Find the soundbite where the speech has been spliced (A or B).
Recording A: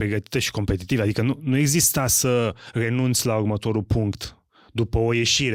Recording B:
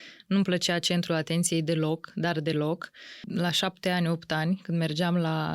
B